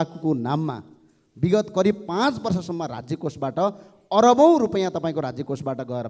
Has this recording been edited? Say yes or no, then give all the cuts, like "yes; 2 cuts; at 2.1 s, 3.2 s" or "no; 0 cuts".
no; 0 cuts